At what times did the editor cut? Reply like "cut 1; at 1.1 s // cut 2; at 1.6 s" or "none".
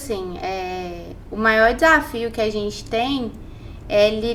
none